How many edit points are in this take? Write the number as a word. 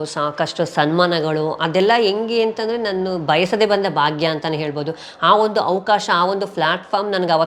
zero